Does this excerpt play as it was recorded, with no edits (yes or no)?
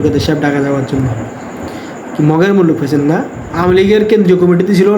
no